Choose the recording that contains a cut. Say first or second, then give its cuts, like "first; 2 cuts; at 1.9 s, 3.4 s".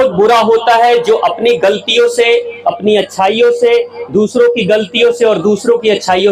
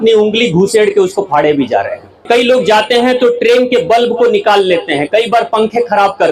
second; 1 cut; at 2.2 s